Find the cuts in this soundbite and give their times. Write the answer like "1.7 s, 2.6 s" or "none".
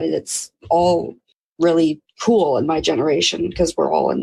1.8 s